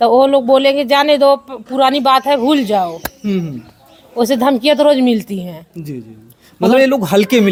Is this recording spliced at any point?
no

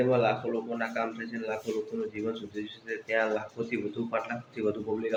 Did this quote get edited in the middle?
no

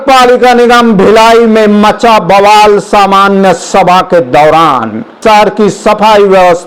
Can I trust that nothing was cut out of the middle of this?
yes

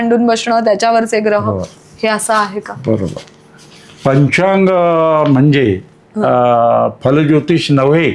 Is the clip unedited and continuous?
yes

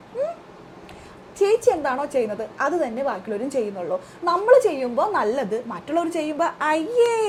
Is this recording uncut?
yes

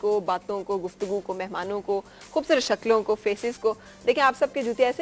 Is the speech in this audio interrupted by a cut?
no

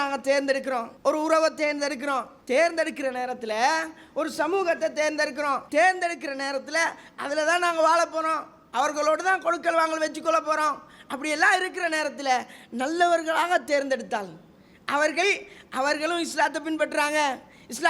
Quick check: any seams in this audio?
yes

